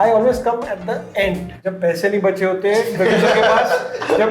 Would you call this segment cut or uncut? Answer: cut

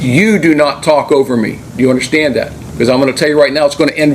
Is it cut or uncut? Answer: cut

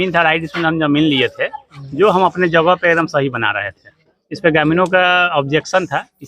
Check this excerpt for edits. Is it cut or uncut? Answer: uncut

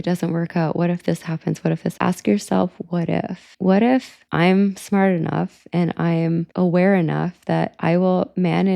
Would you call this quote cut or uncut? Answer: cut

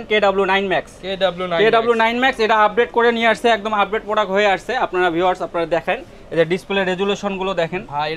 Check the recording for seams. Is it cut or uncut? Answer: uncut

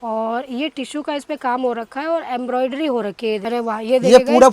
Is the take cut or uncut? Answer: cut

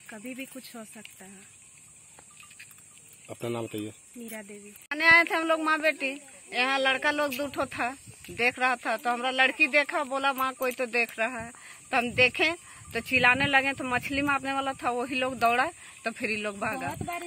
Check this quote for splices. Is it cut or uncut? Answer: uncut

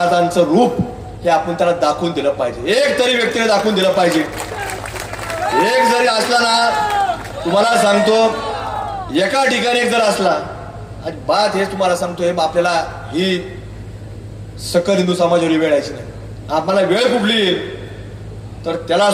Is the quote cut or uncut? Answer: uncut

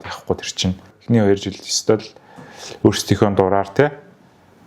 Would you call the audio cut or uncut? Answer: cut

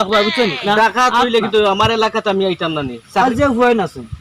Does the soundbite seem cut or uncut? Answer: cut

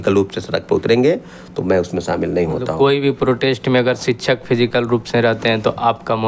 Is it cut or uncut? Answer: uncut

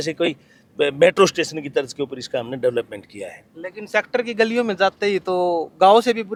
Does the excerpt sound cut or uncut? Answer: uncut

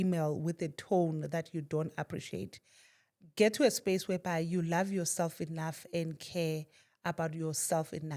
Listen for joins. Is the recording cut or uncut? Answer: uncut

